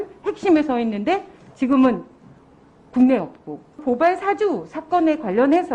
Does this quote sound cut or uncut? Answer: cut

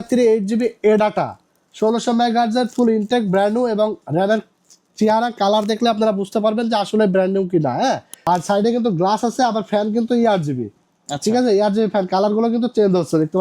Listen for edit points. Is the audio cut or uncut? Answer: cut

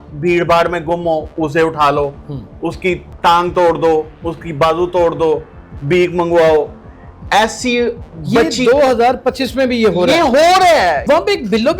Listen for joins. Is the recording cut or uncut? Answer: cut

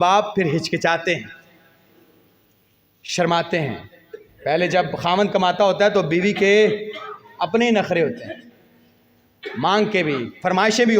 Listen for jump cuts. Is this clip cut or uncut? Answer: uncut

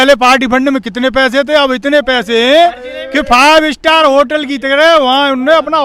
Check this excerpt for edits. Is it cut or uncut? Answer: uncut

